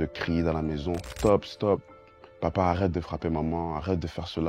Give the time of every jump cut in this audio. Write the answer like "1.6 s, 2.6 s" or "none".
1.1 s